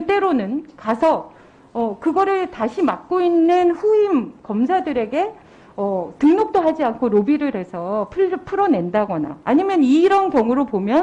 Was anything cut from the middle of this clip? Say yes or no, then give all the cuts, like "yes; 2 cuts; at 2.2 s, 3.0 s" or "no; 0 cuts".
no; 0 cuts